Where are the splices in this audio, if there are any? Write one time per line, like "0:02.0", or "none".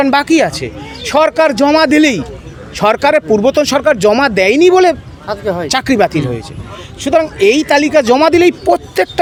none